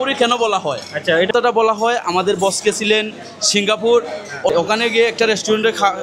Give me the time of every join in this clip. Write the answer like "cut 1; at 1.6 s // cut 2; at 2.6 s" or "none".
cut 1; at 1.3 s // cut 2; at 4.6 s